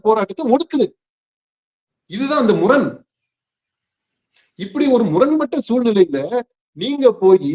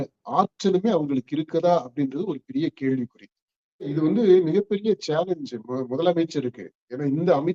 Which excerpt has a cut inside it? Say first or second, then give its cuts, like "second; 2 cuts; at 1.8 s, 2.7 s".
second; 1 cut; at 3.9 s